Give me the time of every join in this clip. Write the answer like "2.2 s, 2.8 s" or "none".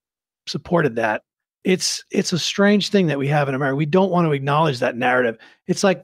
1.5 s